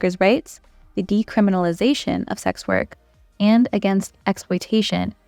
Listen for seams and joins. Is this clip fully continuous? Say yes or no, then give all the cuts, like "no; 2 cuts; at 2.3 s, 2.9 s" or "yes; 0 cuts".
yes; 0 cuts